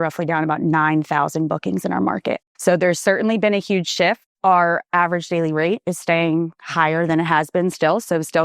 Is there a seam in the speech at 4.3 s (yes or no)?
yes